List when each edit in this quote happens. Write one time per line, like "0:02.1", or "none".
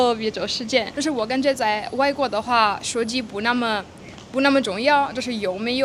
none